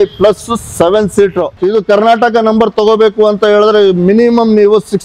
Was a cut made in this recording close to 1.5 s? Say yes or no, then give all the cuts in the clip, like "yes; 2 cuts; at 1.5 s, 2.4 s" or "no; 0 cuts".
yes; 1 cut; at 1.5 s